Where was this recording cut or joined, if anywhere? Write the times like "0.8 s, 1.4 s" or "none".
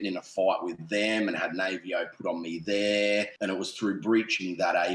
3.3 s